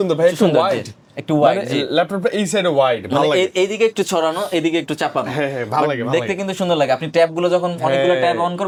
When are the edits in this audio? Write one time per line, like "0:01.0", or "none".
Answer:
none